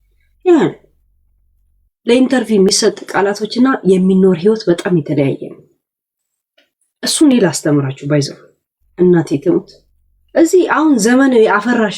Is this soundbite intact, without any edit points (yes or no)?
yes